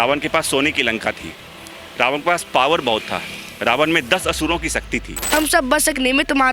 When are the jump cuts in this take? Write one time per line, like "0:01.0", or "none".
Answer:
0:05.3